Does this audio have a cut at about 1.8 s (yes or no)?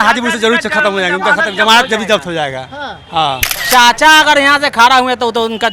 no